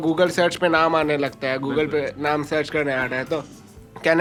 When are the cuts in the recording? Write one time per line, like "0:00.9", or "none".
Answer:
none